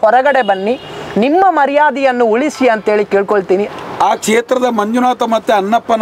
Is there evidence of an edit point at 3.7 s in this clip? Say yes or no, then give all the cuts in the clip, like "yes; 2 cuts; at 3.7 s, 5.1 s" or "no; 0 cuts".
yes; 1 cut; at 3.7 s